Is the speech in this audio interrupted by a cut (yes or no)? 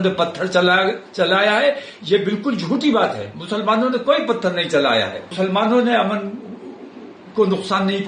yes